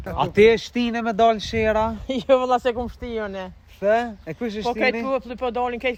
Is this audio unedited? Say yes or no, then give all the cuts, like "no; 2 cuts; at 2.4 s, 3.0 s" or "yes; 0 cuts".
yes; 0 cuts